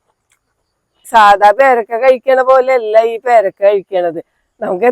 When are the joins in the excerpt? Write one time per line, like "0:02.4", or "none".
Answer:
0:01.1